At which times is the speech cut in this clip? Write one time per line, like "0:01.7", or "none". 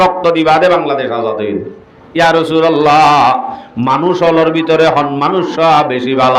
0:02.0